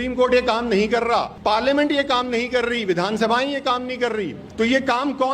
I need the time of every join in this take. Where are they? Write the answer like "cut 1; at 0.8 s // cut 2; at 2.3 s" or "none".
cut 1; at 1.3 s // cut 2; at 4.4 s